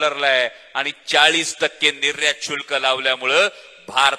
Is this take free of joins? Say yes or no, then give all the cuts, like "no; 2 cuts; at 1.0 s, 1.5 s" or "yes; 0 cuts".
yes; 0 cuts